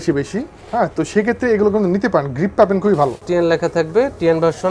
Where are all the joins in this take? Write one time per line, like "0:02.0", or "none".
0:03.2

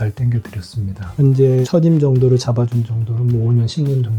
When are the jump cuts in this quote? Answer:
0:01.2

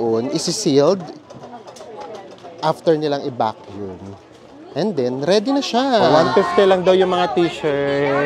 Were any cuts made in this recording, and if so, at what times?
0:06.1

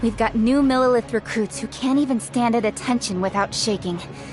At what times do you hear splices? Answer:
none

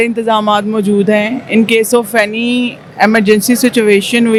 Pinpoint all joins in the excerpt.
none

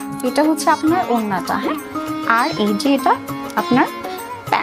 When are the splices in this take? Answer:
none

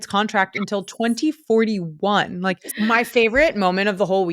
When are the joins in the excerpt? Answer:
0:02.7

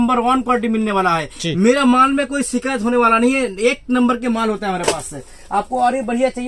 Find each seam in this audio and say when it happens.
none

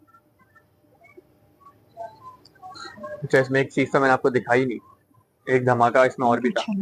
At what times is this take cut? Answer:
none

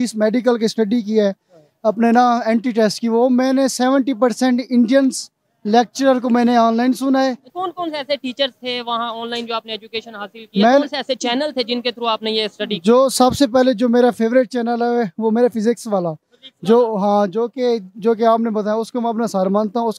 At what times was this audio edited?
0:07.5

